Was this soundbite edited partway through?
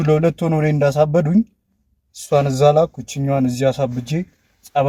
no; 0 cuts

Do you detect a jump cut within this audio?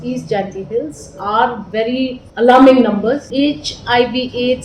yes; 2 cuts; at 2.2 s, 3.2 s

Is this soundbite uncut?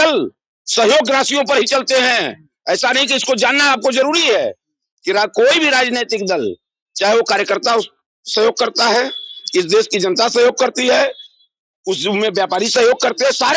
yes; 0 cuts

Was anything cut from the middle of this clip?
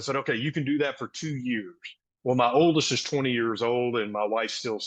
no; 0 cuts

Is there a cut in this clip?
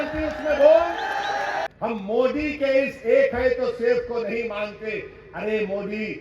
yes; 1 cut; at 1.7 s

